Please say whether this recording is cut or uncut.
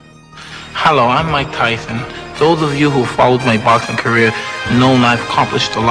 uncut